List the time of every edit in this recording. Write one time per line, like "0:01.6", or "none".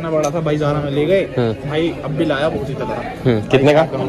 none